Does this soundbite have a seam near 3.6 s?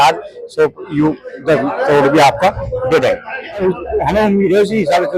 yes; 1 cut; at 3.6 s

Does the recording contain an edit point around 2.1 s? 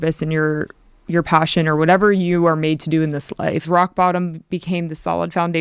no; 1 cut; at 3.6 s

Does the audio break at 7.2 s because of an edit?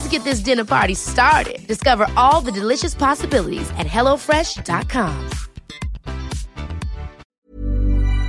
yes; 1 cut; at 7.2 s

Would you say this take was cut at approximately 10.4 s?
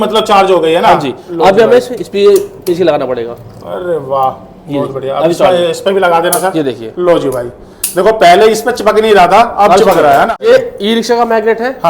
yes; 1 cut; at 10.4 s

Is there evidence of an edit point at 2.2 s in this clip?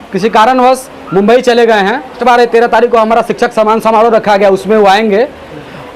yes; 1 cut; at 2.2 s

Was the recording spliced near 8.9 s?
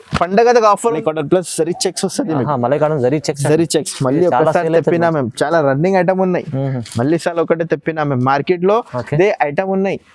no; 1 cut; at 1.0 s

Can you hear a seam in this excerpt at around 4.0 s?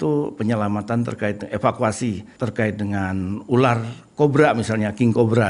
no; 1 cut; at 2.3 s

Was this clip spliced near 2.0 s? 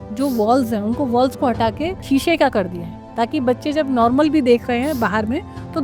yes; 1 cut; at 2.0 s

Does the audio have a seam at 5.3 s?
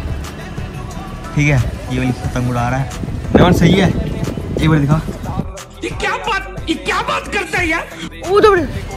no; 0 cuts

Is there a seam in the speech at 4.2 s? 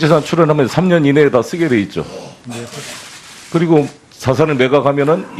yes; 1 cut; at 4.2 s

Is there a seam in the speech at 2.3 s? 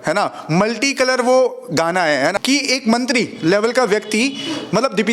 yes; 1 cut; at 2.3 s

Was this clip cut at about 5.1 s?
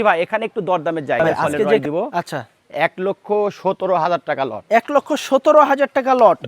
no; 1 cut; at 1.8 s

